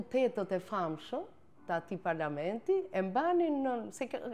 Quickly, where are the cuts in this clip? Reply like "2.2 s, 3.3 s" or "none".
none